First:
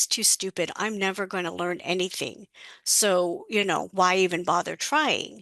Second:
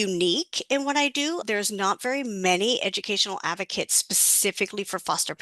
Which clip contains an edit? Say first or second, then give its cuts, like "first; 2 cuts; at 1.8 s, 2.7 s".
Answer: second; 1 cut; at 1.4 s